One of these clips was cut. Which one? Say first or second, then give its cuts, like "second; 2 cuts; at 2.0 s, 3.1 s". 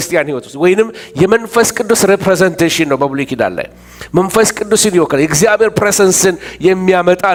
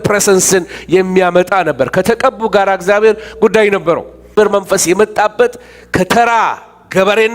second; 1 cut; at 4.4 s